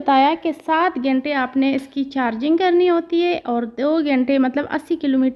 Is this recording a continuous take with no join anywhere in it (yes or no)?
yes